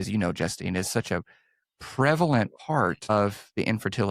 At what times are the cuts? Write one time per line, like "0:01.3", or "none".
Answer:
0:03.1